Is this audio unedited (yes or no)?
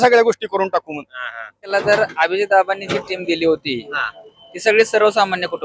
no